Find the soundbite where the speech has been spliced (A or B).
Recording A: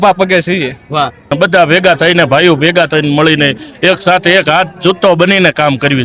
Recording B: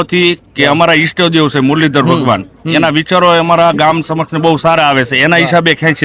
A